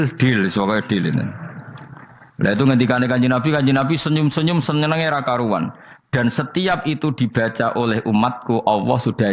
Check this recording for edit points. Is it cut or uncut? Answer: uncut